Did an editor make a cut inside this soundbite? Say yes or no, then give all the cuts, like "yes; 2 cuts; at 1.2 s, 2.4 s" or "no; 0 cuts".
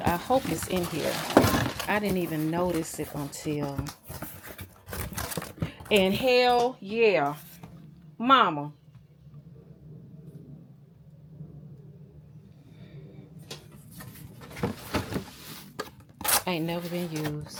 no; 0 cuts